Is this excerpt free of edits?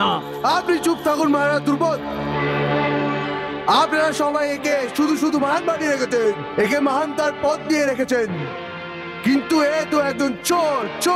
yes; 0 cuts

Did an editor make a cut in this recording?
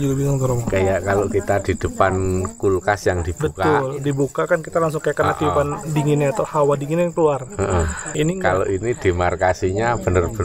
yes; 1 cut; at 8.1 s

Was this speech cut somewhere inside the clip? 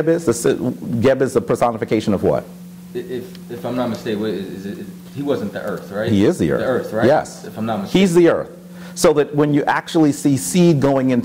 no; 0 cuts

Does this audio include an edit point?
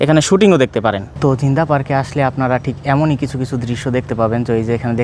no; 0 cuts

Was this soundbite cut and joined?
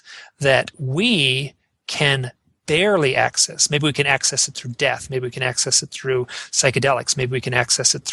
no; 0 cuts

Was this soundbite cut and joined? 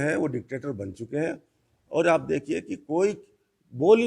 no; 0 cuts

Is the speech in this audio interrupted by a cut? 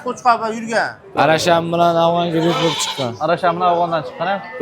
yes; 1 cut; at 1.1 s

